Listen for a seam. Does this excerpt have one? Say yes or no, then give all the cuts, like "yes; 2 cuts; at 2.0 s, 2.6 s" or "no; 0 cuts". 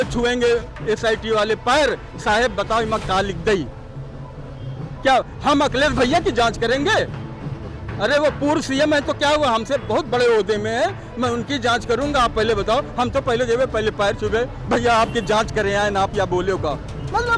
no; 0 cuts